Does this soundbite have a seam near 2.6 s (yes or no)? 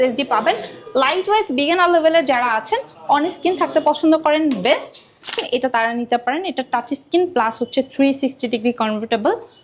no